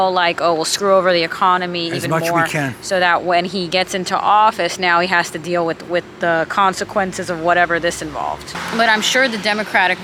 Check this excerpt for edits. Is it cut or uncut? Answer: uncut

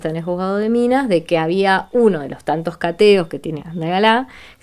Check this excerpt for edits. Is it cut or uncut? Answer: cut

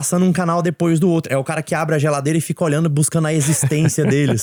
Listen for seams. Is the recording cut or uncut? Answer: uncut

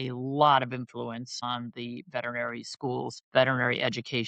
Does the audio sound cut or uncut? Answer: cut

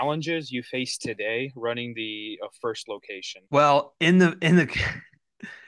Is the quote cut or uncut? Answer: uncut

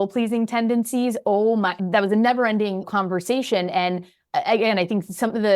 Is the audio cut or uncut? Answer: cut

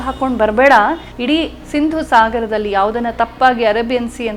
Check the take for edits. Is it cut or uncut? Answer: cut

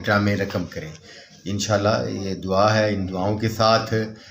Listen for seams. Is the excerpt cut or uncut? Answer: uncut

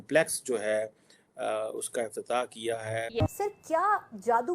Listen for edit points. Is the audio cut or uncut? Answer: cut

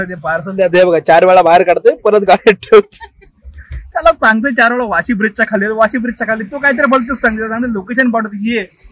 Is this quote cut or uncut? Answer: uncut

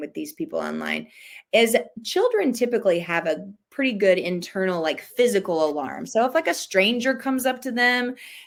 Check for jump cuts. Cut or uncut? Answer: uncut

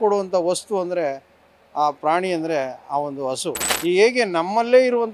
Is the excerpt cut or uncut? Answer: cut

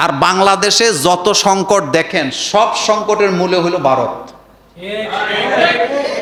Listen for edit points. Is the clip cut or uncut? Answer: uncut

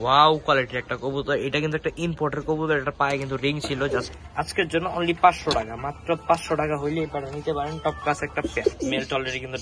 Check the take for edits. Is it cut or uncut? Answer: cut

